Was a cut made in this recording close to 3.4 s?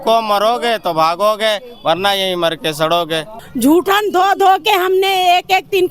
yes; 1 cut; at 3.4 s

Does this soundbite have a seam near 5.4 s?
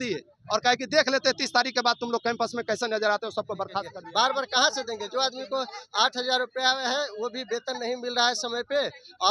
no; 1 cut; at 4.0 s

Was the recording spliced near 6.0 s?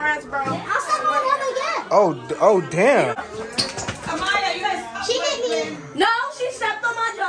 no; 1 cut; at 3.2 s

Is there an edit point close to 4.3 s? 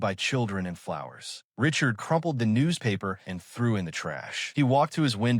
yes; 1 cut; at 4.3 s

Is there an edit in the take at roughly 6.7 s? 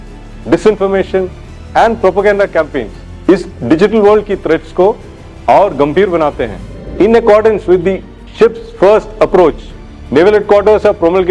yes; 1 cut; at 6.7 s

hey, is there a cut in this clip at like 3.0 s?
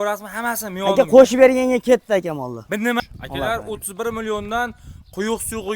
yes; 1 cut; at 3.0 s

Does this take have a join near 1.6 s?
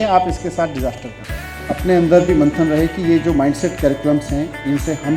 yes; 1 cut; at 1.6 s

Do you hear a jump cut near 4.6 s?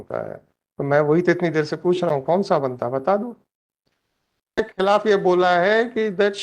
yes; 1 cut; at 4.6 s

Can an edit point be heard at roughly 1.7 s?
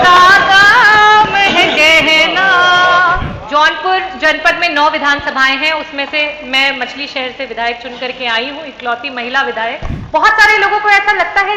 no; 2 cuts; at 3.3 s, 9.9 s

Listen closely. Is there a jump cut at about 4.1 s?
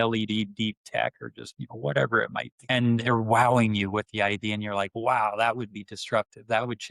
no; 1 cut; at 2.5 s

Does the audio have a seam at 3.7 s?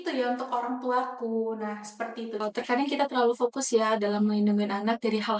no; 1 cut; at 2.4 s

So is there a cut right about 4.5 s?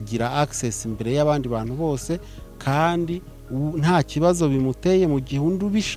no; 0 cuts

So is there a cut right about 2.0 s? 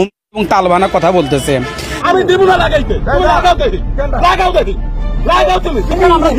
yes; 1 cut; at 2.0 s

